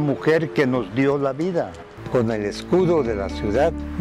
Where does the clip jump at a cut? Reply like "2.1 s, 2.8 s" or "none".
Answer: 1.9 s